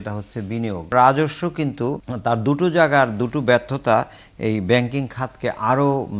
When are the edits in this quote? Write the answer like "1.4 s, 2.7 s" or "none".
0.9 s, 2.1 s

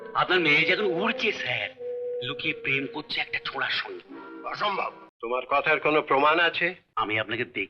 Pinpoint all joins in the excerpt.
5.1 s, 6.8 s

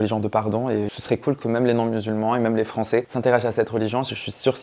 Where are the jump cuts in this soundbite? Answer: 0.9 s

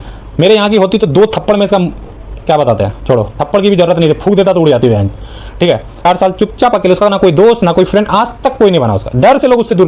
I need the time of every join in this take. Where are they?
5.9 s

